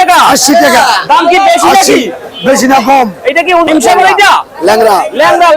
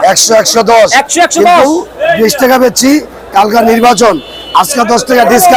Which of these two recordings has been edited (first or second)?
first